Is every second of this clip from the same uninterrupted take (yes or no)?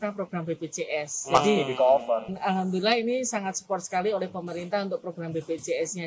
no